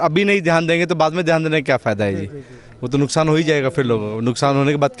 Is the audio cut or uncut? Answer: uncut